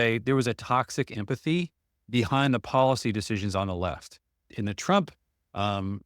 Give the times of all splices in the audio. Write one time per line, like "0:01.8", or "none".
0:04.4